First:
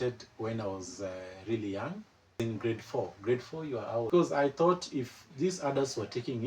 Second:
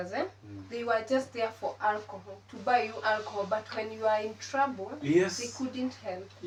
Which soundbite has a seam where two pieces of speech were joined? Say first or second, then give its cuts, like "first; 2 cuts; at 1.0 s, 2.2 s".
first; 2 cuts; at 2.4 s, 4.1 s